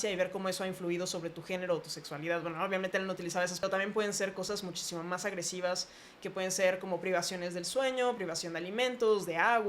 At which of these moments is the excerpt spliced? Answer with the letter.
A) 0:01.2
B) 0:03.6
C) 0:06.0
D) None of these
B